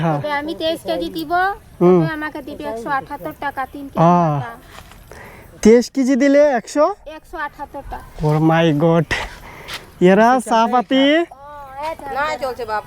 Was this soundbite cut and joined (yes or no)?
no